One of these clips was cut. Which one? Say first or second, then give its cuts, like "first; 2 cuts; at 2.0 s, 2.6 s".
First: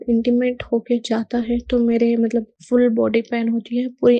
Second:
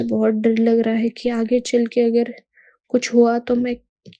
first; 1 cut; at 2.6 s